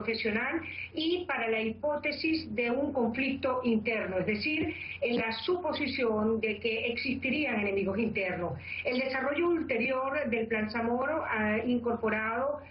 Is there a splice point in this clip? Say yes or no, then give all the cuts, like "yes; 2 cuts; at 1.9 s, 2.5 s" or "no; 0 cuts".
yes; 1 cut; at 2.8 s